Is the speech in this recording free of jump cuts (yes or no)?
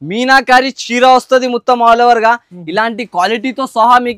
yes